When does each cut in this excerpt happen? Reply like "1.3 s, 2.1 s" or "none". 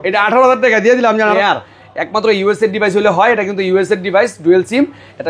1.3 s